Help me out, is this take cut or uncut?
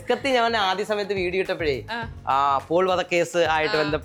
uncut